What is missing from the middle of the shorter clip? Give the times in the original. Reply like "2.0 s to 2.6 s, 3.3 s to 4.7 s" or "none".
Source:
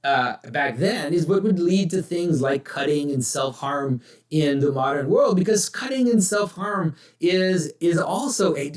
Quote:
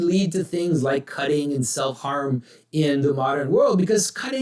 none